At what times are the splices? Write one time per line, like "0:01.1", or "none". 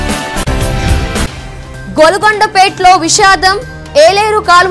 none